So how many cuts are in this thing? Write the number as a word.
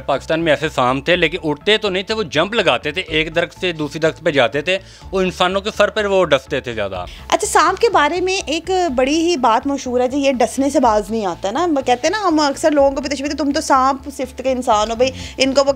zero